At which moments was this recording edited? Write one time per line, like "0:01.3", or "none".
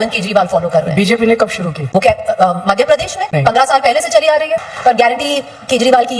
0:04.6